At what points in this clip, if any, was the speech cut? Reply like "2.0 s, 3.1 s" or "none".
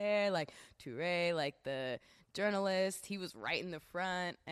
none